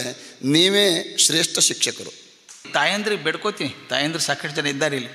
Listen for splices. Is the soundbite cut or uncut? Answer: cut